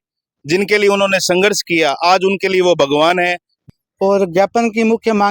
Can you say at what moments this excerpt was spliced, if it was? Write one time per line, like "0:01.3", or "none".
0:03.6